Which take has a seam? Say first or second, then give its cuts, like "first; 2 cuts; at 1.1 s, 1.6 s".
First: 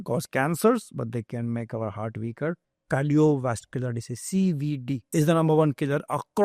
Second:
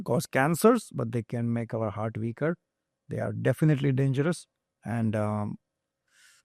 first; 2 cuts; at 2.7 s, 5.1 s